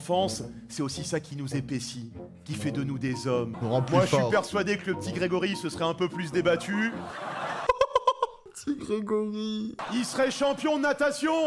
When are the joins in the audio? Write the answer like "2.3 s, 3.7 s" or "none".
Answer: 3.5 s, 8.5 s

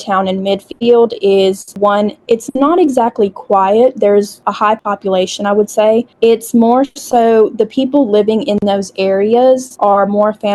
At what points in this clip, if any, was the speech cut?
1.9 s, 4.7 s, 6.1 s, 9.7 s

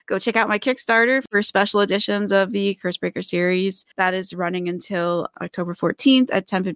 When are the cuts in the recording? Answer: none

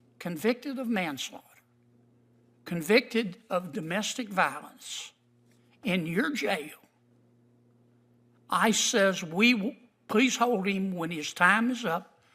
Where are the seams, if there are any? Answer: none

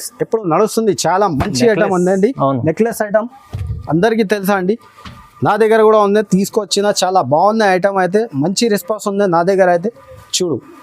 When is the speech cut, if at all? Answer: none

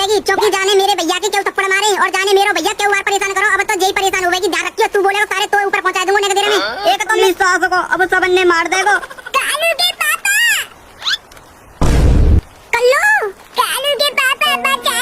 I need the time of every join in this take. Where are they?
7.2 s

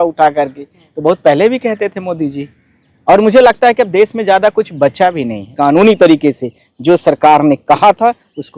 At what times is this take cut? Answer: 5.5 s

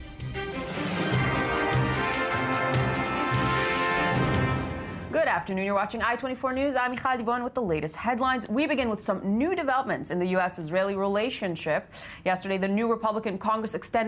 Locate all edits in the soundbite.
none

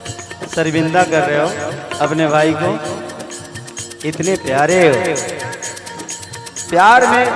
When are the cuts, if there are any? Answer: none

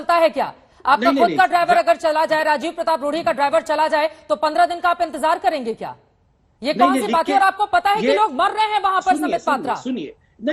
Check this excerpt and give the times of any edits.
none

